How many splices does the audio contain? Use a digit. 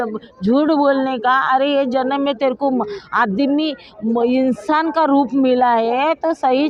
0